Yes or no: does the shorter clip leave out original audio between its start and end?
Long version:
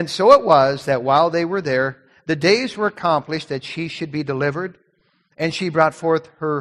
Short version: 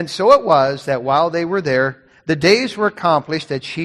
no